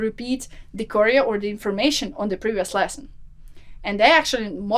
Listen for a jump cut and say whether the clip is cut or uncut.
uncut